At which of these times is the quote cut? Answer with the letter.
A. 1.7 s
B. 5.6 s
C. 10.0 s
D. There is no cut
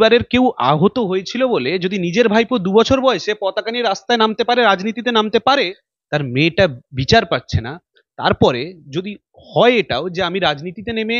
B